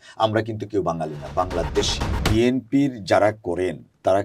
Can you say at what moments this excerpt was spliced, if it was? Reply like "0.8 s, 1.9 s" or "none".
2.1 s